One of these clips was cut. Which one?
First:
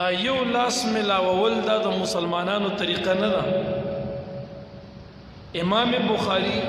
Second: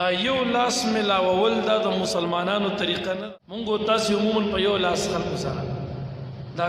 second; 1 cut; at 3.2 s

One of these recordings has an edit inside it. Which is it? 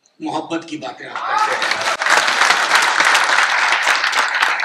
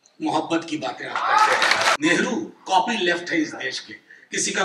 second; 1 cut; at 2.0 s

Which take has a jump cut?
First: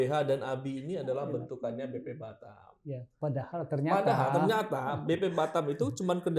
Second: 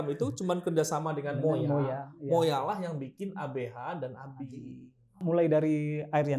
second; 1 cut; at 5.2 s

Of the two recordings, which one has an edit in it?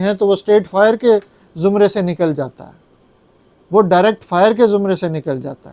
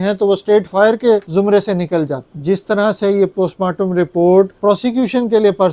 second; 3 cuts; at 1.3 s, 2.3 s, 4.5 s

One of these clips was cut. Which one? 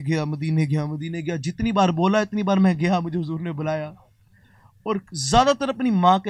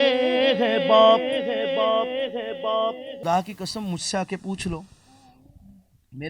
second; 1 cut; at 3.2 s

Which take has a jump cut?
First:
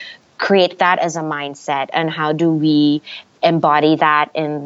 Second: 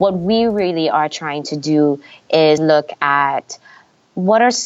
second; 1 cut; at 2.6 s

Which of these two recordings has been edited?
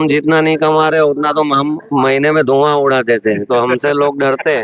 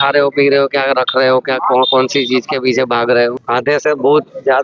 second; 1 cut; at 3.4 s

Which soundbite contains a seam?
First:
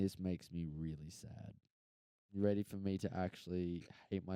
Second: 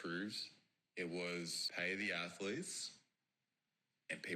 second; 1 cut; at 1.6 s

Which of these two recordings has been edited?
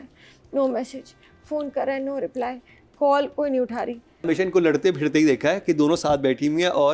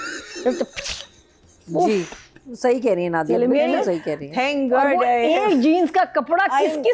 first; 1 cut; at 4.2 s

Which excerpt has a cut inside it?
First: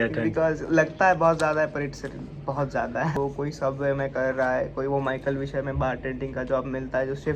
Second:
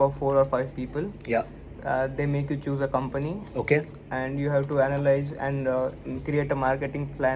first; 1 cut; at 3.1 s

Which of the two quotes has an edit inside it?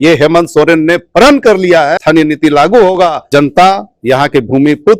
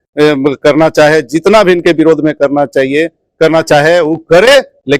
first; 2 cuts; at 2.0 s, 3.2 s

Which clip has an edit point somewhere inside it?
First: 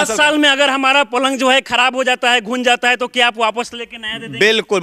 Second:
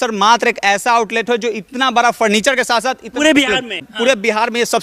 second; 1 cut; at 3.7 s

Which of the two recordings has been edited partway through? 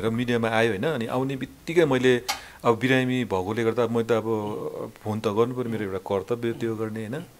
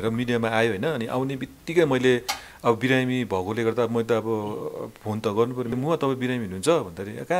second; 1 cut; at 5.7 s

